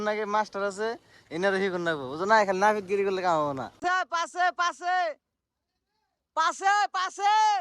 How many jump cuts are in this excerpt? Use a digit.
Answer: 1